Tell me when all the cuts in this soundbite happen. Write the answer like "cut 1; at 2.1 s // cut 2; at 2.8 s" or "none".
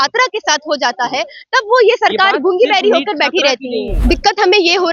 cut 1; at 3.9 s